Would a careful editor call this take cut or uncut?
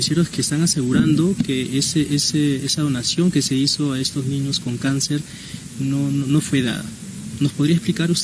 uncut